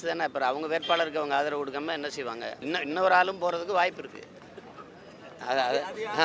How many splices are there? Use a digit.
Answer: 1